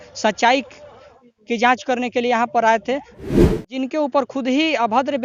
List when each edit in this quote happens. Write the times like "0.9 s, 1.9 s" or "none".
3.3 s